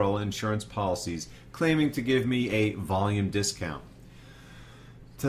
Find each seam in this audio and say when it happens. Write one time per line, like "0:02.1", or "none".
none